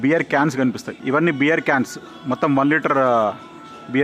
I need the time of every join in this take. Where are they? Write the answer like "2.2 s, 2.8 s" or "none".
0.9 s